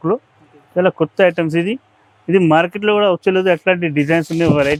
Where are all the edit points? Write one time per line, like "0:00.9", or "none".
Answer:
none